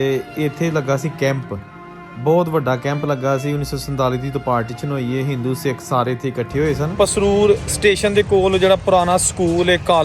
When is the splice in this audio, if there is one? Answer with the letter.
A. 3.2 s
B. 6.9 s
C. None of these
B